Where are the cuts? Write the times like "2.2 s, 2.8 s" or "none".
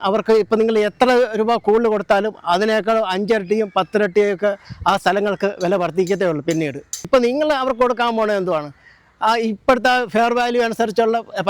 6.9 s